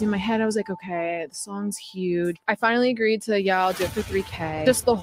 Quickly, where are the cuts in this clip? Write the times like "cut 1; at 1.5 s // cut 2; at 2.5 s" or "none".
cut 1; at 2.4 s